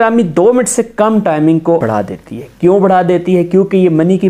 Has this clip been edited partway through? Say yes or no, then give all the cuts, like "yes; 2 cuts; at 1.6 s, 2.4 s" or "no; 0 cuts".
yes; 1 cut; at 1.8 s